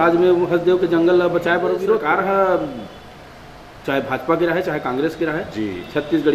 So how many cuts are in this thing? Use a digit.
1